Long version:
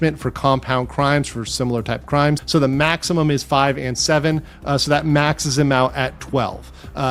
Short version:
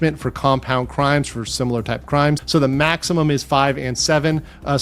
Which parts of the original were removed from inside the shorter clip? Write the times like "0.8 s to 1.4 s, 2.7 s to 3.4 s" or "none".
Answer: none